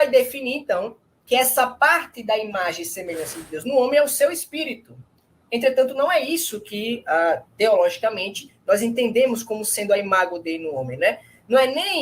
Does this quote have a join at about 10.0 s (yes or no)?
yes